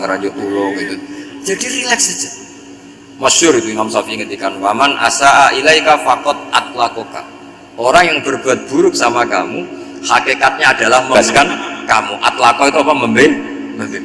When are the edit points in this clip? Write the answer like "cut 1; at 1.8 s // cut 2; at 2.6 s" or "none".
cut 1; at 11.1 s